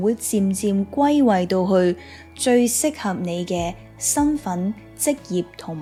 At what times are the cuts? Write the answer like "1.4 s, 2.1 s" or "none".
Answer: none